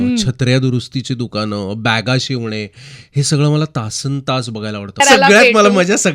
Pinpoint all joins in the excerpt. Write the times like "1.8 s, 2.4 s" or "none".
5.0 s